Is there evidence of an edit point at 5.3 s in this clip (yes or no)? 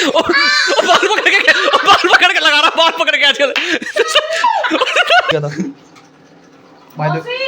yes